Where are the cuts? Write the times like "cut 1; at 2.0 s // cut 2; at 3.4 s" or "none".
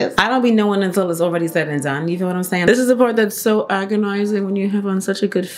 cut 1; at 2.7 s